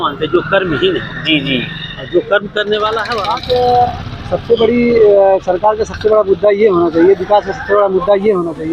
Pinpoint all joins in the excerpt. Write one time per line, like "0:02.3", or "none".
0:03.1